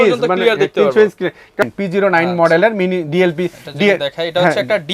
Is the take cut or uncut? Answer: cut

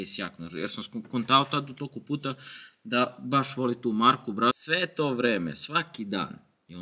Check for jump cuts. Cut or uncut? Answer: cut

